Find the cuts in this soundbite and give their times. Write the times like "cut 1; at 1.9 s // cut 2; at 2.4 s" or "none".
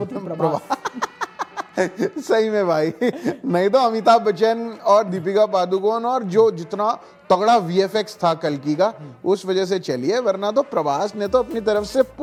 none